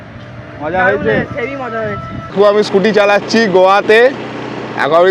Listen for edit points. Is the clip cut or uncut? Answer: cut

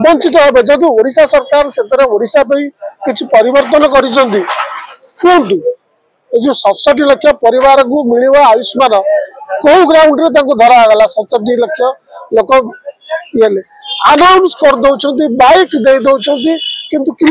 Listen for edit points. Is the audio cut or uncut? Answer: uncut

